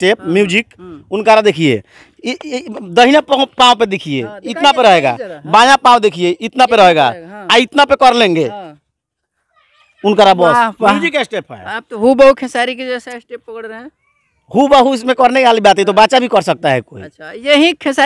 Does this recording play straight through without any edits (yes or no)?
yes